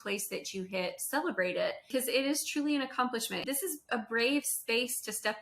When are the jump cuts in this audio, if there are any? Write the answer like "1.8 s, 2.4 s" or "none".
1.9 s, 3.4 s